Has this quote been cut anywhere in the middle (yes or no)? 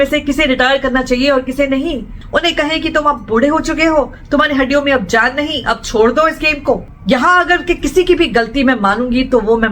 yes